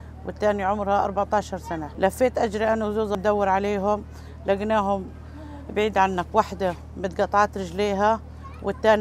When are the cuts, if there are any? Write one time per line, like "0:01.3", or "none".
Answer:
0:01.9
0:03.1